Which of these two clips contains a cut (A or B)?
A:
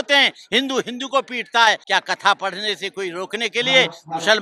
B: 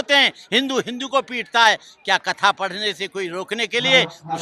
A